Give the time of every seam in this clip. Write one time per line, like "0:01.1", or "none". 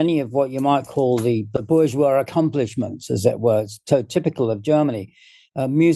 none